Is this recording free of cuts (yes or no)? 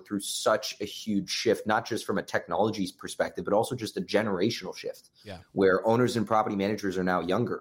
yes